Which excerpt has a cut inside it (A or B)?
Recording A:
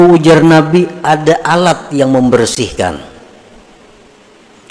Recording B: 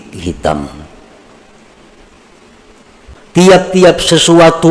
B